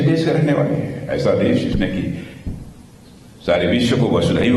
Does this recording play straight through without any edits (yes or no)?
yes